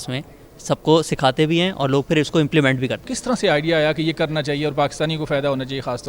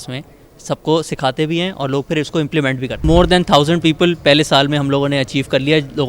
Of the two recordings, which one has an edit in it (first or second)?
second